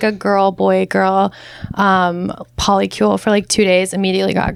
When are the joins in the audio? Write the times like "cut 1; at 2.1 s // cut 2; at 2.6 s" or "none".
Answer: none